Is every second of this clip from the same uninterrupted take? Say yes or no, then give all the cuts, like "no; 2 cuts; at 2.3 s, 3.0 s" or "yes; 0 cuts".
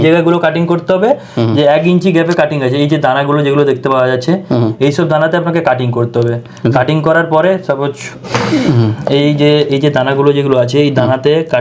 yes; 0 cuts